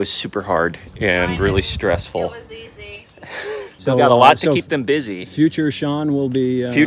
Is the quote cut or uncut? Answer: cut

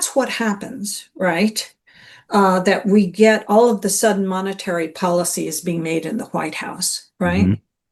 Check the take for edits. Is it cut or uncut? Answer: uncut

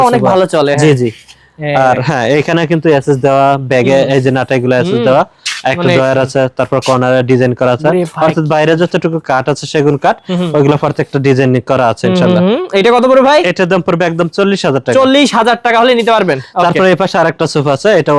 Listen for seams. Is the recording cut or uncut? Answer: uncut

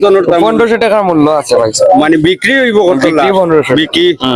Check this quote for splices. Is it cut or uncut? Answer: uncut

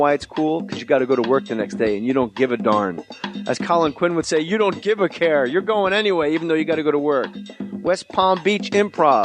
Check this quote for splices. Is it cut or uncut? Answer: cut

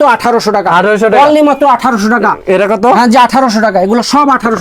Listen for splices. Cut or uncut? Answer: uncut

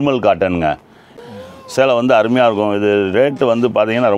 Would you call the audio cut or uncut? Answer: cut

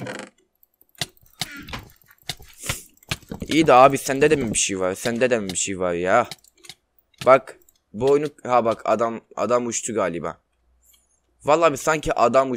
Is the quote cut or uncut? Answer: uncut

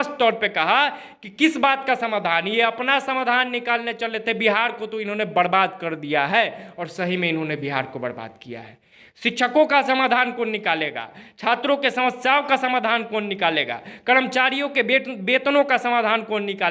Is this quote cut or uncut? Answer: uncut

